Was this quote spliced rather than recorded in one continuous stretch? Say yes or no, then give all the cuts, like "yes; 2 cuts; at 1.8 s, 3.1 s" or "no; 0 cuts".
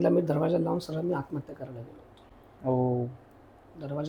no; 0 cuts